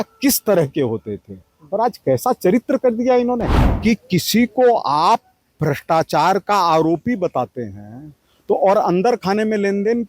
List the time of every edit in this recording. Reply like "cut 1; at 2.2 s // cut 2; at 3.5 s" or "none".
cut 1; at 3.6 s